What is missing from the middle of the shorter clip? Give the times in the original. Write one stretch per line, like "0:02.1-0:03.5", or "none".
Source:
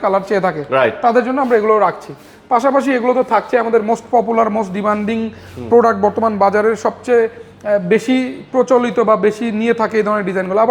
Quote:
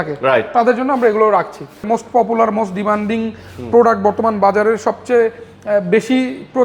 0:02.3-0:03.8